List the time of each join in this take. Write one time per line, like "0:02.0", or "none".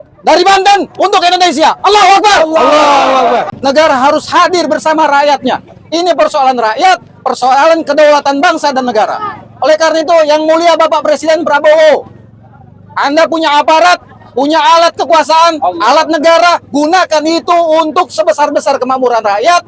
0:03.5